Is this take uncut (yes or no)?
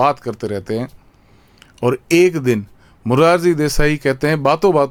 yes